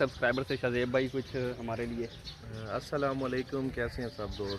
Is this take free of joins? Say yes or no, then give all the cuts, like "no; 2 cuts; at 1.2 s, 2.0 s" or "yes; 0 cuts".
yes; 0 cuts